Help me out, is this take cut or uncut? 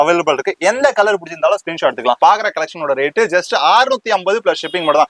cut